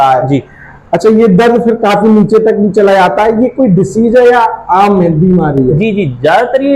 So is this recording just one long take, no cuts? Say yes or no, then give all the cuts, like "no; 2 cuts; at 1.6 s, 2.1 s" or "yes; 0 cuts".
yes; 0 cuts